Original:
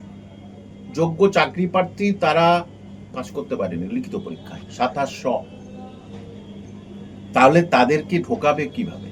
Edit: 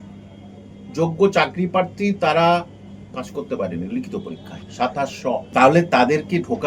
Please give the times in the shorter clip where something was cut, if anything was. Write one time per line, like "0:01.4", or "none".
0:05.5